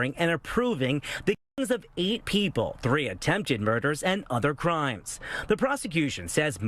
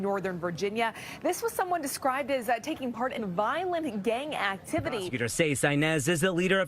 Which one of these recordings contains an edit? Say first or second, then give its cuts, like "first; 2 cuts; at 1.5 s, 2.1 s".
second; 1 cut; at 5.0 s